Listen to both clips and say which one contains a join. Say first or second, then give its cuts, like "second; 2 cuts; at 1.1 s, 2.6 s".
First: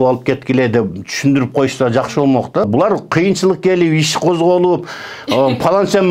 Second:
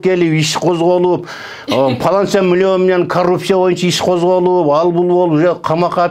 first; 1 cut; at 2.6 s